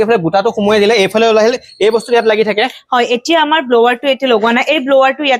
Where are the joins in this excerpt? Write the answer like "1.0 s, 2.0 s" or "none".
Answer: none

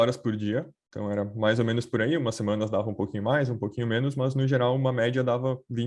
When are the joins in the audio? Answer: none

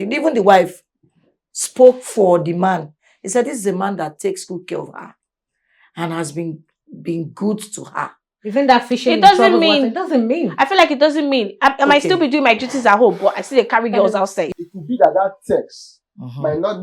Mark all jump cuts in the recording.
14.5 s

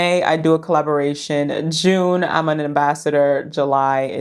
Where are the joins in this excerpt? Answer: none

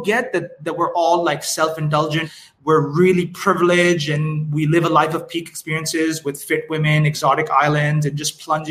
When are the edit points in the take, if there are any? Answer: 2.3 s

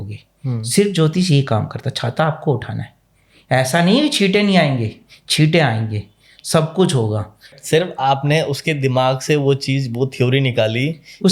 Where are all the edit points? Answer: 7.6 s

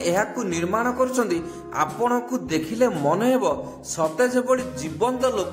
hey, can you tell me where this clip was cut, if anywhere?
none

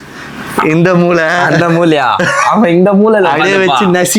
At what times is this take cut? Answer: none

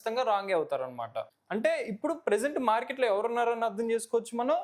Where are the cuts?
1.2 s

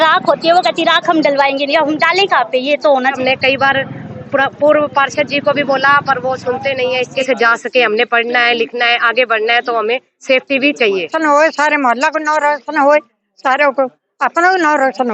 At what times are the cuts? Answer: 3.2 s, 7.2 s, 11.1 s

